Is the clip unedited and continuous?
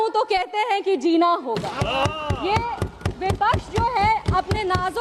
yes; 0 cuts

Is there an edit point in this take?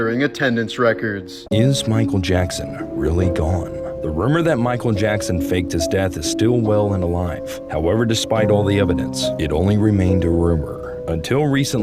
yes; 1 cut; at 1.4 s

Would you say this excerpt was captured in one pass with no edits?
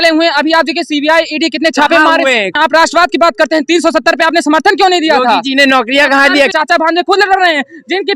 no; 2 cuts; at 2.5 s, 6.5 s

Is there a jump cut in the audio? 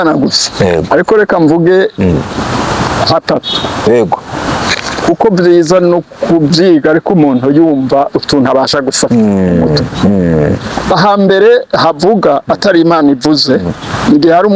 no; 0 cuts

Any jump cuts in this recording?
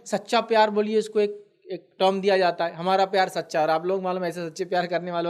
no; 0 cuts

